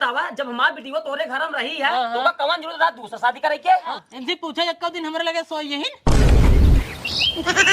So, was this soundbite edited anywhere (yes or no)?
yes